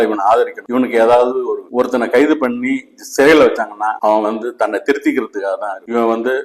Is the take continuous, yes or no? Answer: no